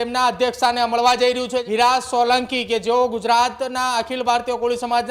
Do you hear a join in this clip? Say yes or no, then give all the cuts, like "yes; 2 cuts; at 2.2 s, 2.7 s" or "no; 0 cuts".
yes; 1 cut; at 1.6 s